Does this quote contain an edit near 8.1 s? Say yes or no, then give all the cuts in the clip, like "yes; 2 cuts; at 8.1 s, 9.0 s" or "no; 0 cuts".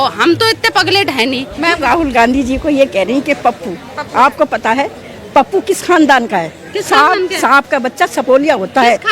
no; 1 cut; at 1.5 s